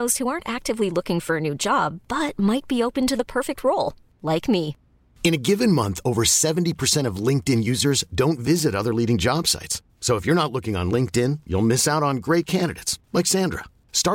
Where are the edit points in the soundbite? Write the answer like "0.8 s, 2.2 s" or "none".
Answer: none